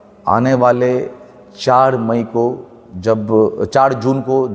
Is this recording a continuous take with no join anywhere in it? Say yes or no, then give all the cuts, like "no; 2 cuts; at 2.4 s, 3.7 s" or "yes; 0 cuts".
yes; 0 cuts